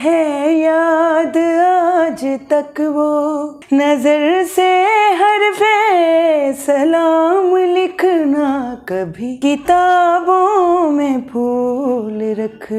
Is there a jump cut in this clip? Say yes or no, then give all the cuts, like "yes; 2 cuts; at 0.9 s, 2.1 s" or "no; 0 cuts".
no; 0 cuts